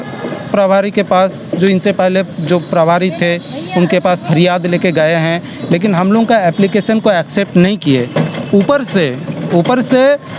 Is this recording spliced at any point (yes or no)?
no